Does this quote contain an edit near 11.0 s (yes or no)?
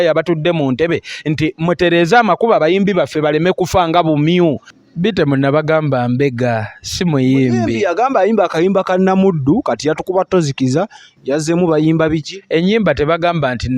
no